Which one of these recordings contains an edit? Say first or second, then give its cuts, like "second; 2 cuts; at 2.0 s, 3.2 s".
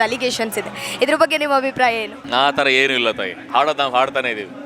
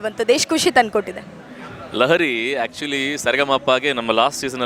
first; 1 cut; at 2.1 s